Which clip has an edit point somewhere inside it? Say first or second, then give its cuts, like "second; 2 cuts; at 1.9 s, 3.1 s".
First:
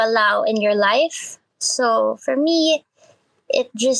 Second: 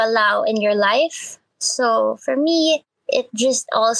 second; 1 cut; at 2.9 s